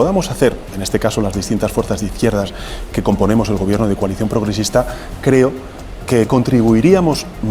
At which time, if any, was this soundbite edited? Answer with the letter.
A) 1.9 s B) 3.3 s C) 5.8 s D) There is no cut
D